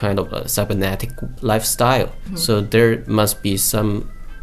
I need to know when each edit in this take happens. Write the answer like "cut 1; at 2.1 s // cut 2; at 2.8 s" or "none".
cut 1; at 2.3 s